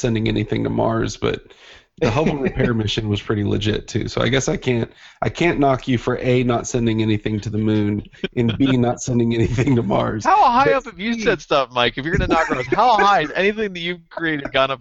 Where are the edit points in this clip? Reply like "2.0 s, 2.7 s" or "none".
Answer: none

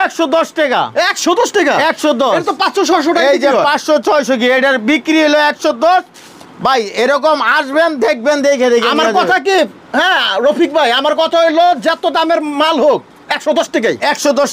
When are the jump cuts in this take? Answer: none

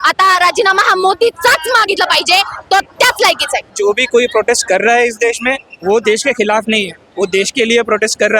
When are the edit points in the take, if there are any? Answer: 3.7 s

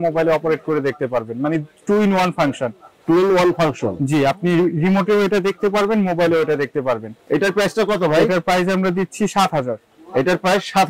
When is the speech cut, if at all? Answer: none

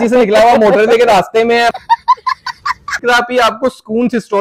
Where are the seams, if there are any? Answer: 1.7 s, 3.0 s

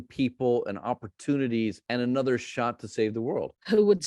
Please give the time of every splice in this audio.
none

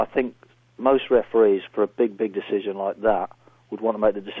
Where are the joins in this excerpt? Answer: none

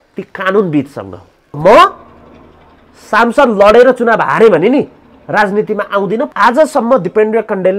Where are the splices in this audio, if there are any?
1.6 s, 6.3 s

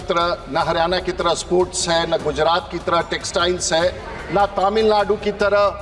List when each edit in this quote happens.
none

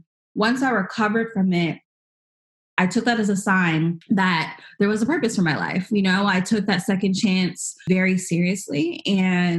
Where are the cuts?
4.0 s, 7.9 s

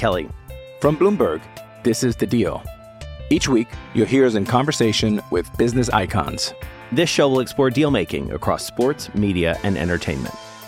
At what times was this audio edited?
none

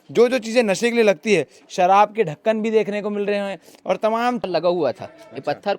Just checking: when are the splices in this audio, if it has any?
4.4 s

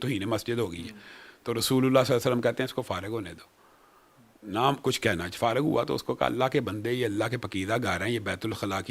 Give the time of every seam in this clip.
none

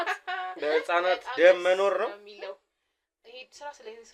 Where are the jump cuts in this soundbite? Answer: none

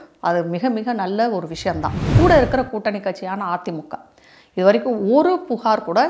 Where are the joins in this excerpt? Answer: 2.1 s

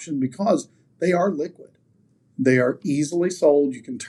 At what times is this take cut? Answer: none

